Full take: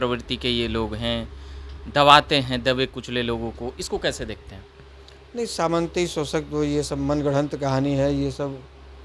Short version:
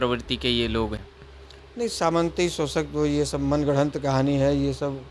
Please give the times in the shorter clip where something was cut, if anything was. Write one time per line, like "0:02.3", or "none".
0:01.0